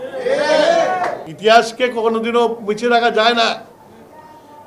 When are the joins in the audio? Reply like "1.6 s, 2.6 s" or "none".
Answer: 1.2 s